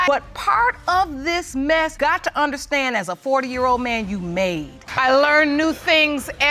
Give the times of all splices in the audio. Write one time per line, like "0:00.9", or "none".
0:04.8

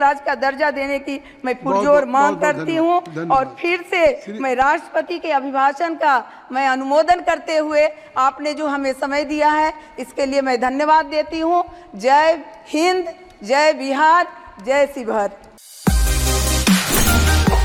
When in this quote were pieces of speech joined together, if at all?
none

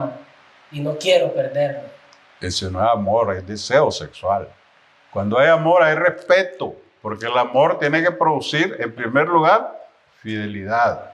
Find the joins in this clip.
none

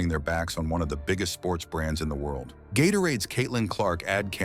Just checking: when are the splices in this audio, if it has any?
0:02.5

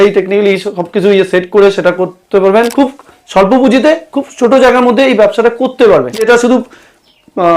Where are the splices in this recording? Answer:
0:02.7
0:06.2

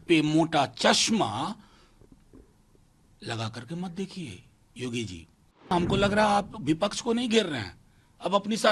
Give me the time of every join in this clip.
0:05.7

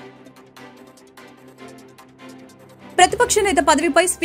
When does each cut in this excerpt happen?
0:01.3

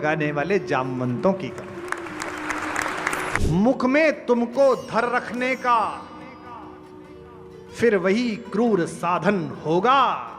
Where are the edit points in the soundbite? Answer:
0:03.4

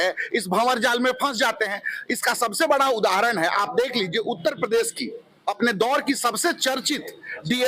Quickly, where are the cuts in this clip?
none

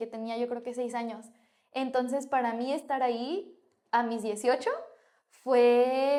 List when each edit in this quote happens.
none

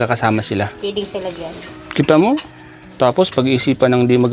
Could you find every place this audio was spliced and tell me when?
none

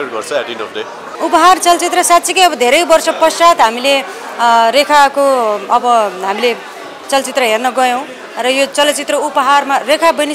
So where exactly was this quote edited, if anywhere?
0:01.0

